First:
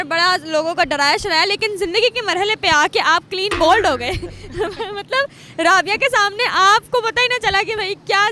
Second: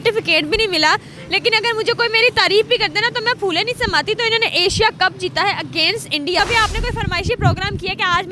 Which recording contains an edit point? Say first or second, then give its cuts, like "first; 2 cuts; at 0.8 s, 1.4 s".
second; 1 cut; at 6.4 s